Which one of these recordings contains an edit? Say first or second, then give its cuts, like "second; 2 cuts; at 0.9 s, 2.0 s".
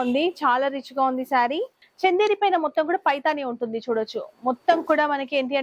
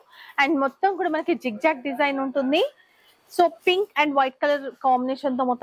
first; 1 cut; at 1.8 s